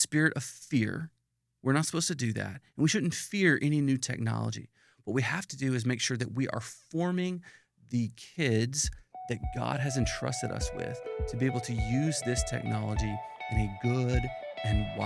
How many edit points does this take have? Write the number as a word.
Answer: zero